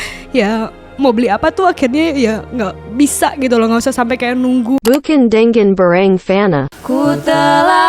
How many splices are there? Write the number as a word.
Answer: one